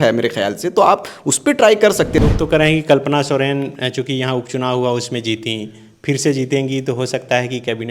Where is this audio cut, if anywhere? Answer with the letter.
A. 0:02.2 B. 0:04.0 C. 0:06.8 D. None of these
A